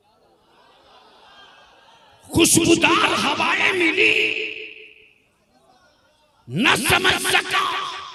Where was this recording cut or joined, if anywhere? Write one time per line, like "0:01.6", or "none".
none